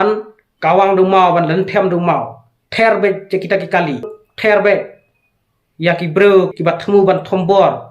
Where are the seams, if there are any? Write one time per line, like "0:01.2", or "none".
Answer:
0:04.2
0:06.5

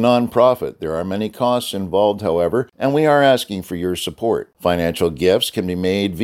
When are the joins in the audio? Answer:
0:02.7

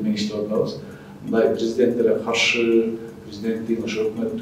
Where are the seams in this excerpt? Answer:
none

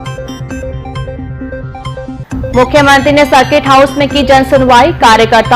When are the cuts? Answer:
0:01.9

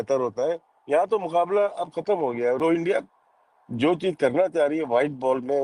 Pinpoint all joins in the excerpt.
0:02.6

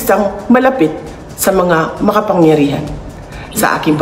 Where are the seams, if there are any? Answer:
0:03.0

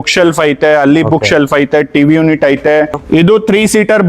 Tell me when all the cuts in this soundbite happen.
0:03.0

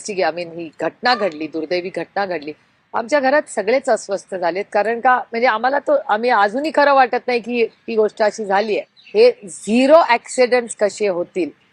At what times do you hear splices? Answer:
0:08.9

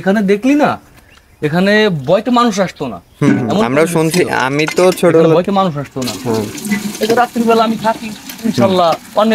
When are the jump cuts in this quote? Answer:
none

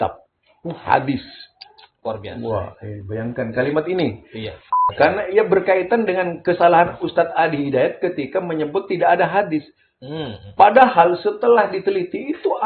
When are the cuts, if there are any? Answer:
0:04.8

